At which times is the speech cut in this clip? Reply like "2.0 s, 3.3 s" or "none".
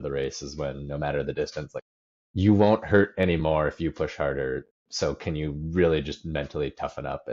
1.7 s